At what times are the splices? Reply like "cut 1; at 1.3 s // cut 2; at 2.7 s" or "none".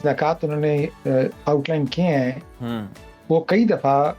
none